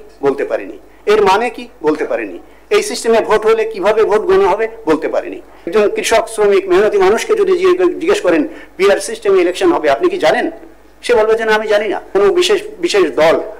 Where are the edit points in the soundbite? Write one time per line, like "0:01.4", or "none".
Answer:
0:05.7
0:12.0